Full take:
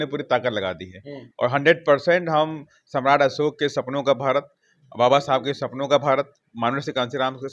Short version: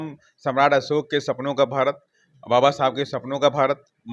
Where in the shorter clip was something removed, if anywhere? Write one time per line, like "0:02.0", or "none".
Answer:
none